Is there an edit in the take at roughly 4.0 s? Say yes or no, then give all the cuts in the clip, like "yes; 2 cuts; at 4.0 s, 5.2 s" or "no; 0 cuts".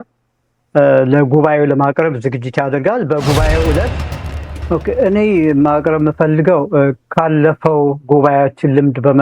yes; 1 cut; at 4.0 s